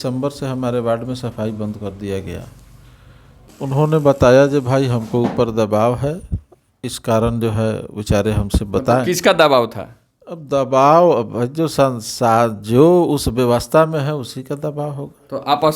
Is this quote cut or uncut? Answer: cut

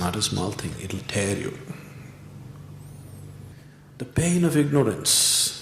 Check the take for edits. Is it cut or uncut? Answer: cut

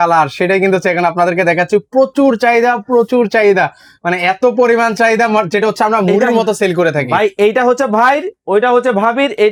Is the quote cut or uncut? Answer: uncut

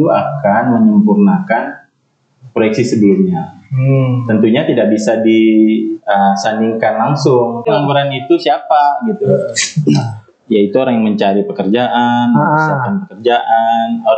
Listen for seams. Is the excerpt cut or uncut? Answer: cut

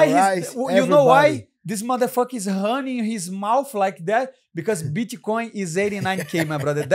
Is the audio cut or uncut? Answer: uncut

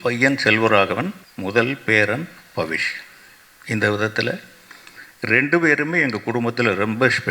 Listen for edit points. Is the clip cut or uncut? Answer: cut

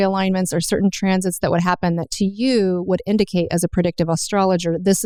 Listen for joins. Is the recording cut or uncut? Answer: uncut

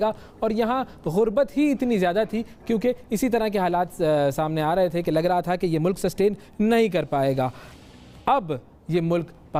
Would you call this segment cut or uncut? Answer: uncut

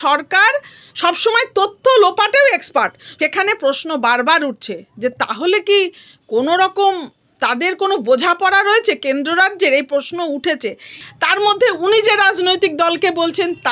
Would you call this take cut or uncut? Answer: cut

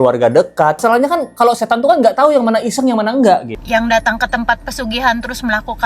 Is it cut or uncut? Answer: cut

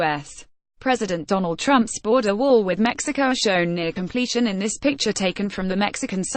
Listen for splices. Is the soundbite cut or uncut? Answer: cut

